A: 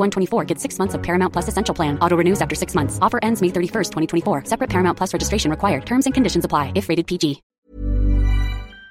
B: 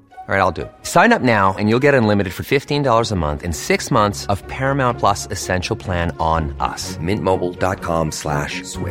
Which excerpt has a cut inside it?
A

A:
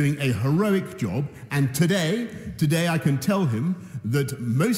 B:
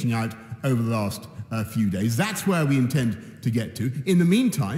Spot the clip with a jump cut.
A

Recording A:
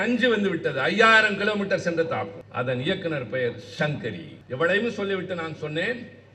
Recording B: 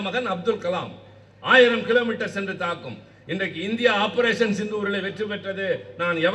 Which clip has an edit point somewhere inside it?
A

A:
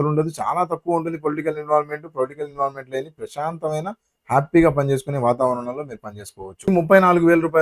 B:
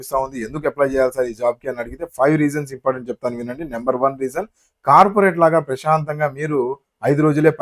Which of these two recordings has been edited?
A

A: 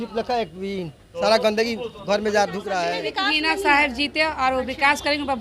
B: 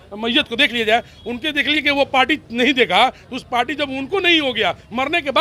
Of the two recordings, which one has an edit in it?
A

